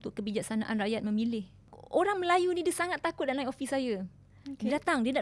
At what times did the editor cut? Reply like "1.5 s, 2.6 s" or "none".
1.8 s